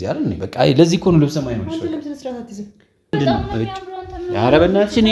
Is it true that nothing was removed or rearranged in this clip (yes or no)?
no